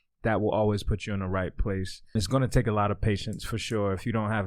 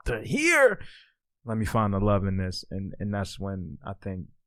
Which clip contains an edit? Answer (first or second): first